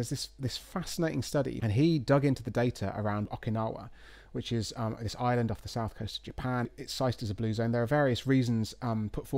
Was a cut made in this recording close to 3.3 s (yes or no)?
yes